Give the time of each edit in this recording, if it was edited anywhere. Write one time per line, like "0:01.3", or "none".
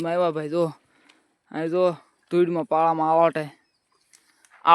none